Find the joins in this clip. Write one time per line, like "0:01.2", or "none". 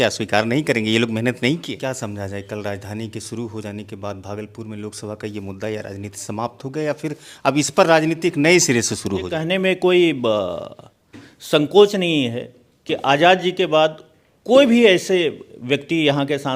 0:01.8
0:09.4